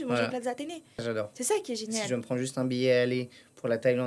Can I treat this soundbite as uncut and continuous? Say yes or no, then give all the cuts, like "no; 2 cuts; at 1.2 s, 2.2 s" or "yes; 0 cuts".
no; 1 cut; at 1.0 s